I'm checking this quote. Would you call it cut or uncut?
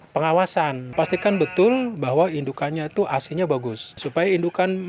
cut